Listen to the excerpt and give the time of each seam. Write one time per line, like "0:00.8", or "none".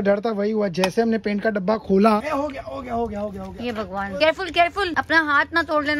0:02.2
0:04.2
0:04.9

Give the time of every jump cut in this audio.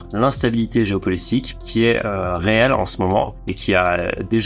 none

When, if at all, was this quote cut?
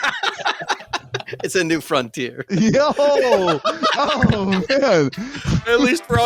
none

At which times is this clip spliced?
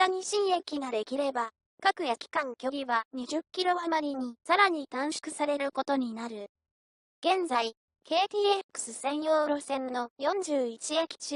0:04.9

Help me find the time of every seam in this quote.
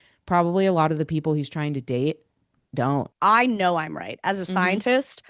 0:03.1

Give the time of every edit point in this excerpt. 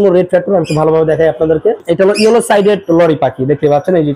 0:01.8

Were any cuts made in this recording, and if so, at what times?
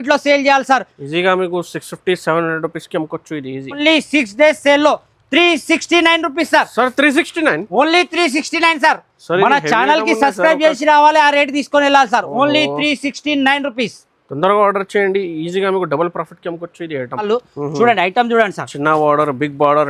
0:03.8
0:17.2

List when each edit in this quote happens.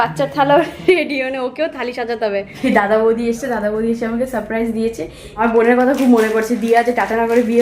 0:02.5
0:05.4

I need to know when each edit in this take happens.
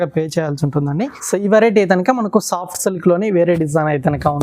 0:01.0

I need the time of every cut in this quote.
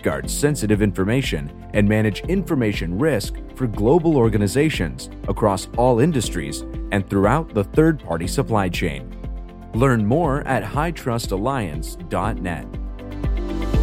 0:12.9

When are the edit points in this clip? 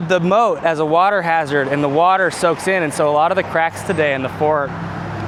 none

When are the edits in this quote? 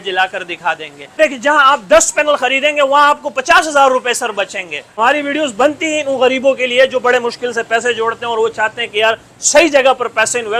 0:01.2
0:05.0

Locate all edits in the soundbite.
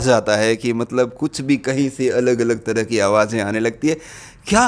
none

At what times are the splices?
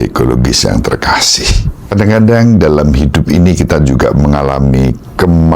0:01.8

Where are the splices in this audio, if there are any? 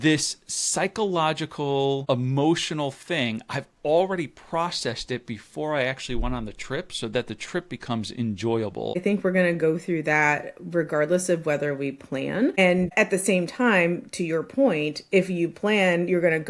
0:02.0
0:09.0
0:12.7

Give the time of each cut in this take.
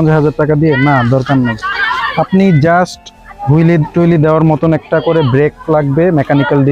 none

